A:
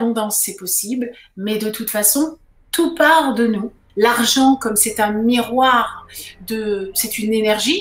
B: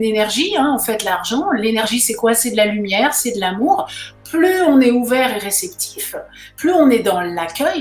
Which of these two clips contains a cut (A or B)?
A